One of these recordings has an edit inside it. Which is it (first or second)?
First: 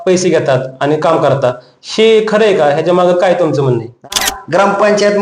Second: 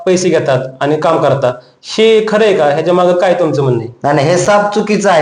first